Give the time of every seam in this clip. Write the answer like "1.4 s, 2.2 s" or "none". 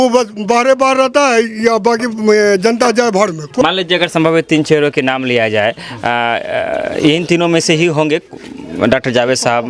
3.5 s